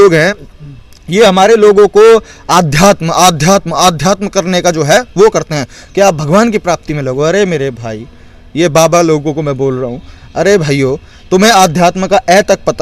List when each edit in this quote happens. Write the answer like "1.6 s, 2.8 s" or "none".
none